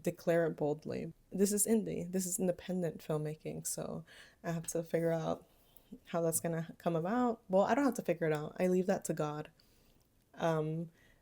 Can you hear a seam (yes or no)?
yes